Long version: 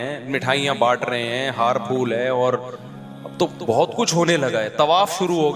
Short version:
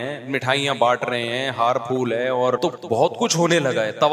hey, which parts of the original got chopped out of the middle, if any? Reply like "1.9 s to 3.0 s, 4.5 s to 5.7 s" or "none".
2.6 s to 3.4 s